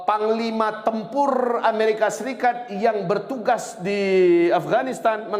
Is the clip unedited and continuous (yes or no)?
yes